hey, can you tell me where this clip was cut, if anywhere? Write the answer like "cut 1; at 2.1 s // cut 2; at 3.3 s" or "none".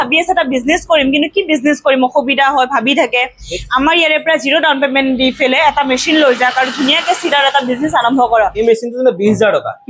cut 1; at 8.6 s